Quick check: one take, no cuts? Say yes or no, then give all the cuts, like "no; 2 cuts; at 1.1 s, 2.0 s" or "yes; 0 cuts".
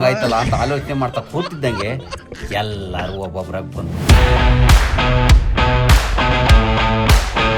yes; 0 cuts